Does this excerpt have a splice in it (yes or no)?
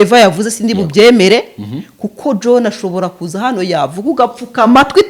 no